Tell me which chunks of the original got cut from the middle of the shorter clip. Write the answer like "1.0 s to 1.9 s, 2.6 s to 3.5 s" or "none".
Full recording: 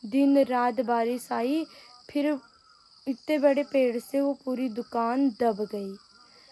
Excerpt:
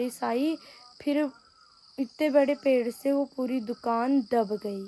none